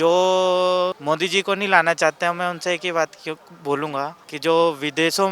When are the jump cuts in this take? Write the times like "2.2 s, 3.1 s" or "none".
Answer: 1.0 s, 4.2 s